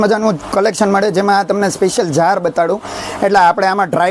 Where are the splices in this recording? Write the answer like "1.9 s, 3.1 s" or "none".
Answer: none